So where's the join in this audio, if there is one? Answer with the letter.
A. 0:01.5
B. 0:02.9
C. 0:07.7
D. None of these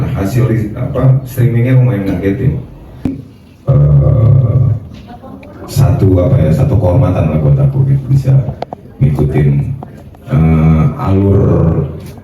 B